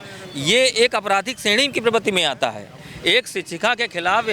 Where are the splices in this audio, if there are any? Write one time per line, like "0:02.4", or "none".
none

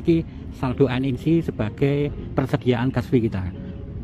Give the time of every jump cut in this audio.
0:02.2

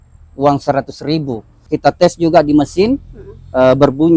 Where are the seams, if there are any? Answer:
0:01.7

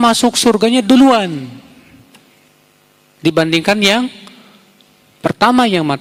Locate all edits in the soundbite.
none

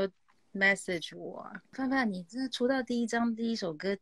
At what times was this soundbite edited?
0:01.7

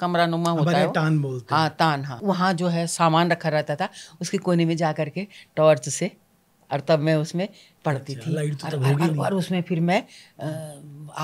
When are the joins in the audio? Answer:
0:02.2

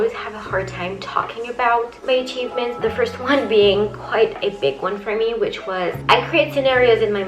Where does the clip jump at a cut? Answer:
0:02.7
0:06.0

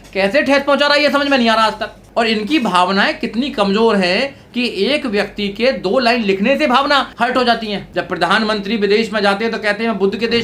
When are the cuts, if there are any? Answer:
0:01.9
0:07.1
0:07.8

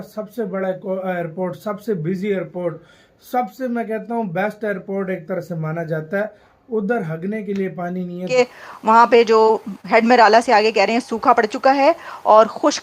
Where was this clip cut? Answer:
0:08.4

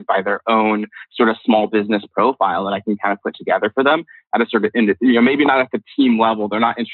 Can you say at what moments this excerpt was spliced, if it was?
none

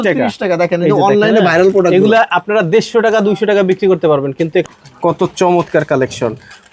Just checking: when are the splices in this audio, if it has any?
0:04.6

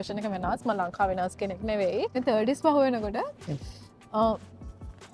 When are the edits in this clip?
0:02.2

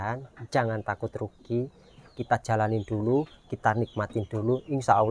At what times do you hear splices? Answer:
0:02.0

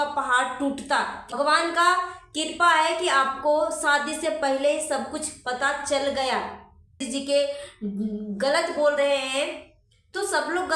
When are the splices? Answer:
0:01.2
0:07.0

